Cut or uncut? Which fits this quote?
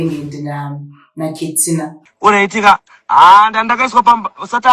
uncut